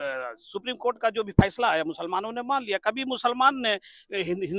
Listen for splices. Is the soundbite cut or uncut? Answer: uncut